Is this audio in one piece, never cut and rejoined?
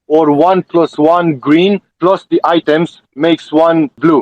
yes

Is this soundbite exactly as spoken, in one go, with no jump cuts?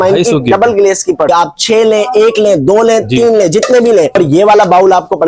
no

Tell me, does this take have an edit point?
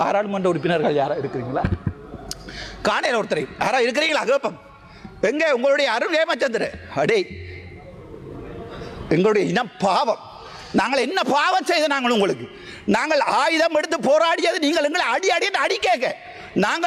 no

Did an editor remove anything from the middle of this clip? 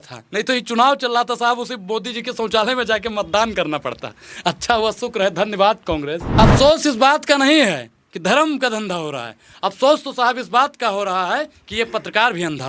yes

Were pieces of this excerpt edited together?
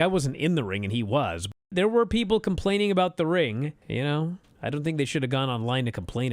yes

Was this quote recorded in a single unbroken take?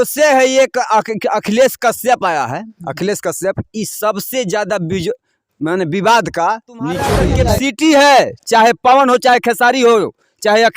no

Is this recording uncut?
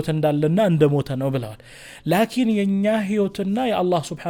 yes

